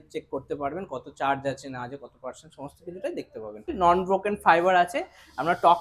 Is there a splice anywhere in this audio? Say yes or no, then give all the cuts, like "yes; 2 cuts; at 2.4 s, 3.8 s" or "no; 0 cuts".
yes; 1 cut; at 3.7 s